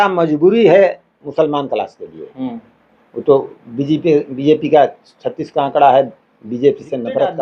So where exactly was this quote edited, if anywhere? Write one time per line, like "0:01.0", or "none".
none